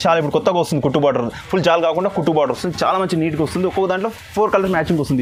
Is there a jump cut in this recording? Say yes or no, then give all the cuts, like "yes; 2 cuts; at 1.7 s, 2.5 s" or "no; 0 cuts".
no; 0 cuts